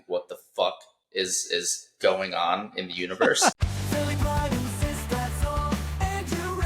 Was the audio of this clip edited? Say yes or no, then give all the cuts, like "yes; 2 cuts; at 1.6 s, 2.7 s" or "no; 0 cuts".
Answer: yes; 1 cut; at 3.6 s